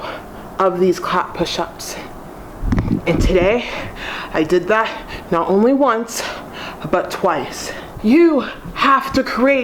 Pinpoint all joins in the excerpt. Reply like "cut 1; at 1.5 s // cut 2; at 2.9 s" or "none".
cut 1; at 7.9 s